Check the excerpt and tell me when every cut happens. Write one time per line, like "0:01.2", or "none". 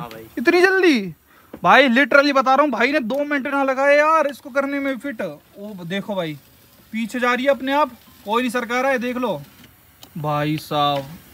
none